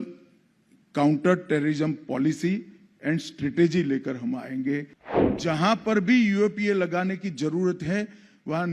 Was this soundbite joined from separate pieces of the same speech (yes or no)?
yes